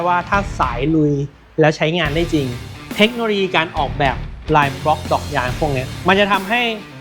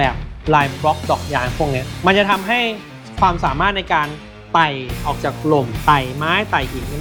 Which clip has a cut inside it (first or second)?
first